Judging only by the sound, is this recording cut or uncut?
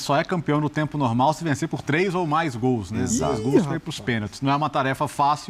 uncut